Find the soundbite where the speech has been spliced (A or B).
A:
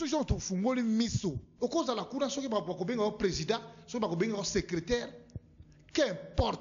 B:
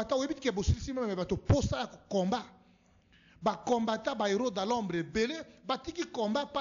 A